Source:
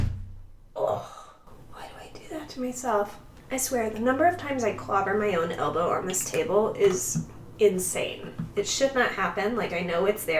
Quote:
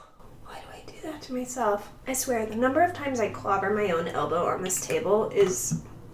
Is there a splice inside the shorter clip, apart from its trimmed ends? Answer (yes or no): yes